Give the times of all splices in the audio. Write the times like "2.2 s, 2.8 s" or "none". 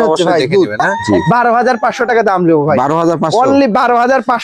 0.9 s